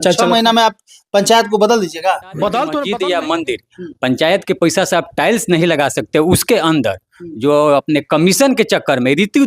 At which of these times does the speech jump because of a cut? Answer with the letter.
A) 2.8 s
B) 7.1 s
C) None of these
A